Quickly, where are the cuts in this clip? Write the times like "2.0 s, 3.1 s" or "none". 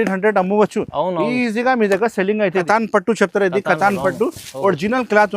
2.7 s